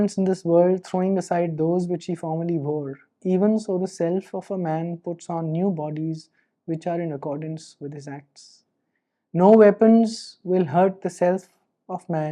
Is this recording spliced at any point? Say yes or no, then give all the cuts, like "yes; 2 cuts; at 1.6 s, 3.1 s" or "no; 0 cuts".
no; 0 cuts